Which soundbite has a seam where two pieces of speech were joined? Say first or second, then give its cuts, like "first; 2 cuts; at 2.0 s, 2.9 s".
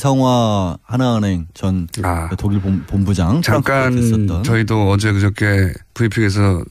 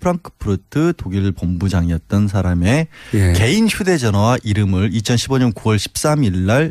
first; 1 cut; at 1.3 s